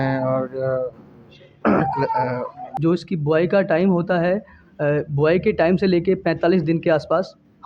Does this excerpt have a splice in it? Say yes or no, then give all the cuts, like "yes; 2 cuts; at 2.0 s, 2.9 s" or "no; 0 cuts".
yes; 1 cut; at 2.6 s